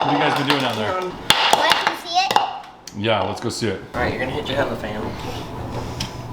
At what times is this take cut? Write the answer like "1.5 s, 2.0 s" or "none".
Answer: 1.1 s, 3.9 s